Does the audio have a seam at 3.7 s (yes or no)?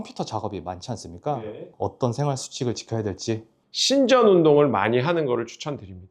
yes